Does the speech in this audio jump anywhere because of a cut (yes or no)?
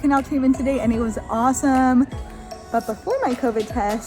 yes